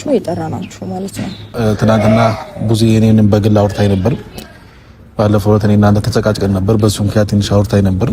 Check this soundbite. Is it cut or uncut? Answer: cut